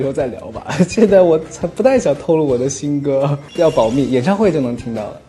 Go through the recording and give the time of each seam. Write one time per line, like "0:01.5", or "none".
none